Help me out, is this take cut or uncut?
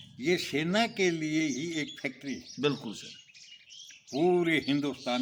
uncut